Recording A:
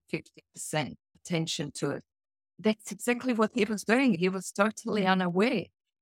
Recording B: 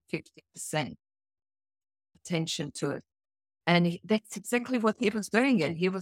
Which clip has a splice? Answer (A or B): A